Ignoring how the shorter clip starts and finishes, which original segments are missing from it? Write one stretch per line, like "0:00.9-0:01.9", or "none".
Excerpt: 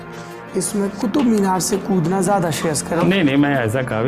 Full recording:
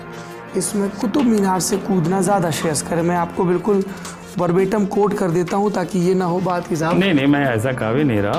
0:03.0-0:06.9